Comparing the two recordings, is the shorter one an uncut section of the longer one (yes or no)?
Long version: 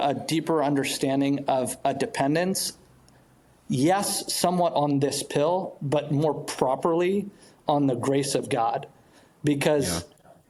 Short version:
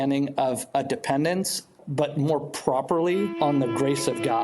no